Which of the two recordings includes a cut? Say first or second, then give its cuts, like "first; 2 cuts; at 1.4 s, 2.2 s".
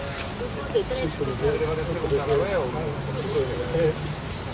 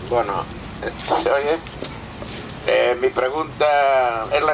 first; 1 cut; at 1.7 s